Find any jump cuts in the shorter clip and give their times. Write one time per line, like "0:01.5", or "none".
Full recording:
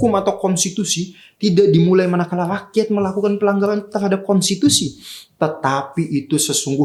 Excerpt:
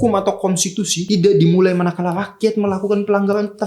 0:01.0